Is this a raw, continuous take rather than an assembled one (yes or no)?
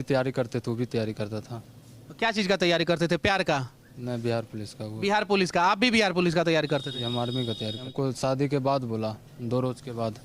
no